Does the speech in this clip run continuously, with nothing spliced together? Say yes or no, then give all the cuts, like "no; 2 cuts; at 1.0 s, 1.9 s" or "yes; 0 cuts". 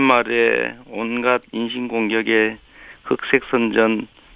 no; 1 cut; at 2.3 s